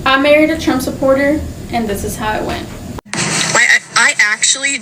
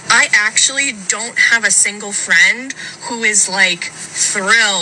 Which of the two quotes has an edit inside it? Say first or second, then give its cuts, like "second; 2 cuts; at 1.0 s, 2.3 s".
first; 1 cut; at 2.9 s